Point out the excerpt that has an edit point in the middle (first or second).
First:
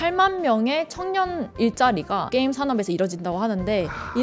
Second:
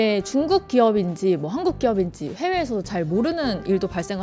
first